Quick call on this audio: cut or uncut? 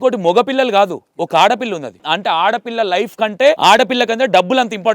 cut